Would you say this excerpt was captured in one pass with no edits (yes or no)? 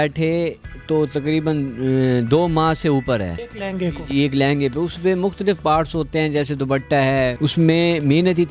yes